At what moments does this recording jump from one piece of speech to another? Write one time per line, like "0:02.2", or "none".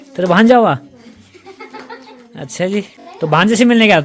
0:03.0